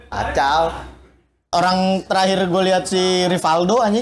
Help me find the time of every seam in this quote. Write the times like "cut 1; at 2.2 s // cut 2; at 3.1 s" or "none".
none